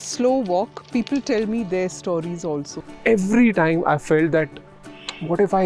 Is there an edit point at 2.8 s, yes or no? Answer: yes